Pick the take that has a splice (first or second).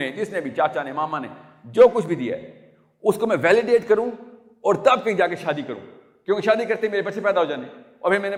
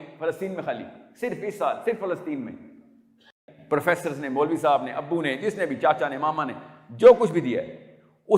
second